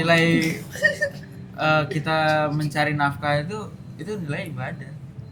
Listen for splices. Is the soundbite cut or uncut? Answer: uncut